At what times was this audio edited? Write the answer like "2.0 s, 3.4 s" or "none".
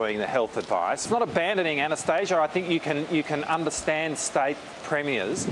1.0 s